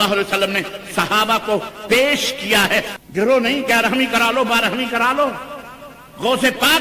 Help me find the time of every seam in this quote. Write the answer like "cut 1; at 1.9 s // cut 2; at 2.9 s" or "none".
cut 1; at 2.9 s